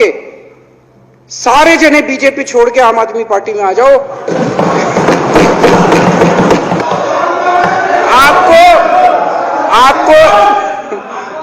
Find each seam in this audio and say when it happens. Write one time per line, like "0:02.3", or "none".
0:06.8

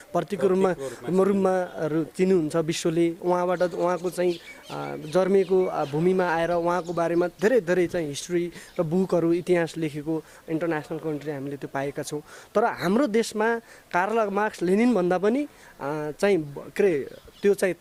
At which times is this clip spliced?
none

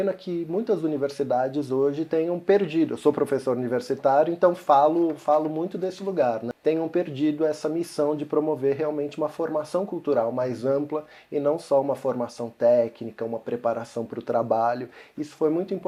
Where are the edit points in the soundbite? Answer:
none

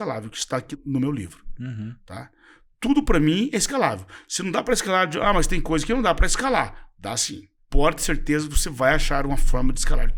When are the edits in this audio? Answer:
none

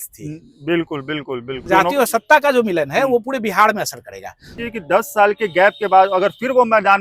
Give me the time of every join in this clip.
0:01.6
0:04.5

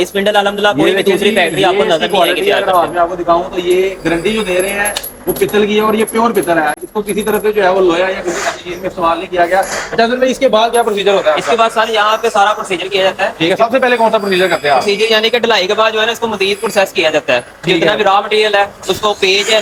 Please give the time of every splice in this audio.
none

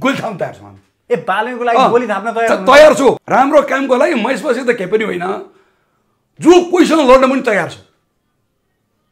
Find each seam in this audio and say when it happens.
0:03.2

